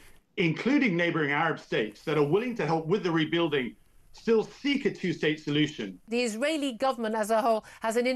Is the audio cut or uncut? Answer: cut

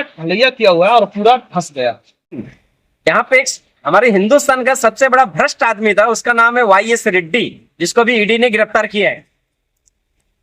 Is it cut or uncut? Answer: cut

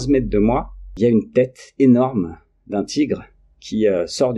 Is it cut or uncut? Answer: cut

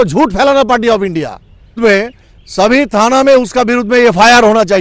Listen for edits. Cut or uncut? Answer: cut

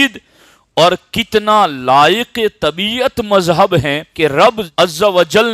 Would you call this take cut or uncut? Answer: cut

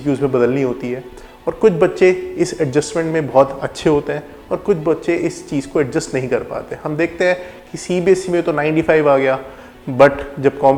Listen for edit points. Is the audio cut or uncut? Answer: uncut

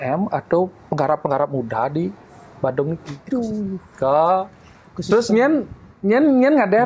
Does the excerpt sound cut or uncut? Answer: cut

